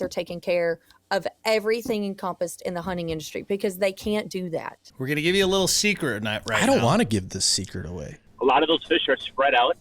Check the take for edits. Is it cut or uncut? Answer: cut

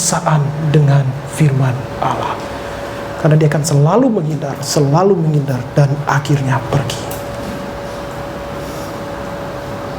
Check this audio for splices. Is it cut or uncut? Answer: uncut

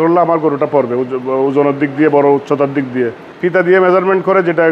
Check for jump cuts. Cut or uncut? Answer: cut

